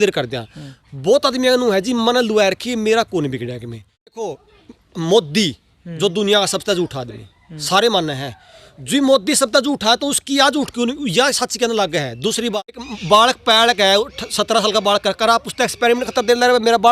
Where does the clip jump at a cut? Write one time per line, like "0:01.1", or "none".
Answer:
0:04.3
0:12.9

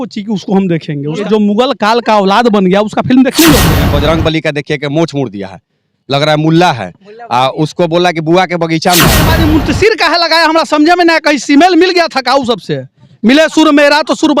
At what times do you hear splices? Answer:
0:01.2
0:03.8
0:09.3

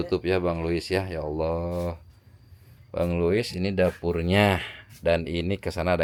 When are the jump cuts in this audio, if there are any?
none

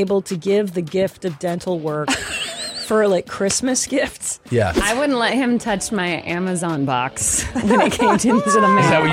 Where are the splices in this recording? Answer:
0:04.8

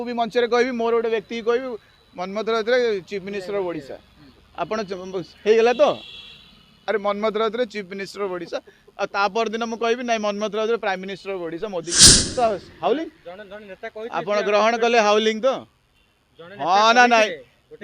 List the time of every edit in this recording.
0:12.3

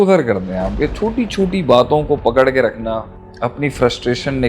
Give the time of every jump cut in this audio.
0:03.1

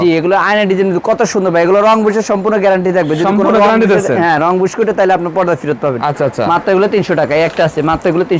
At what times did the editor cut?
none

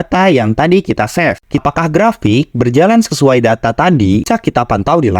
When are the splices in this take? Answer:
0:01.6
0:04.3

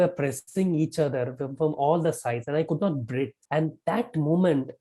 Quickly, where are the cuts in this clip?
0:03.4

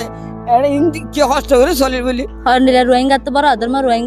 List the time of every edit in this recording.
0:02.3

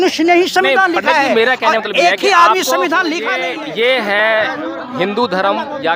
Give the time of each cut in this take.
0:03.4

